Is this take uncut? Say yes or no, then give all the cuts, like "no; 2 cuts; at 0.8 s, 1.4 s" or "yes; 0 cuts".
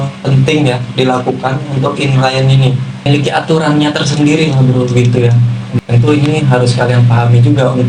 no; 1 cut; at 3.1 s